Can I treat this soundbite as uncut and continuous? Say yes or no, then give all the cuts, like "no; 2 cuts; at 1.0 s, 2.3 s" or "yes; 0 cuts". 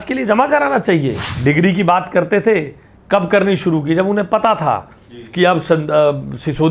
no; 1 cut; at 1.3 s